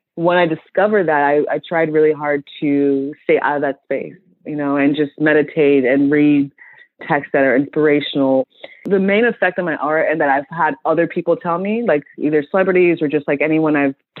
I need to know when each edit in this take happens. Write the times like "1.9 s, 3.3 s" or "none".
7.0 s, 8.4 s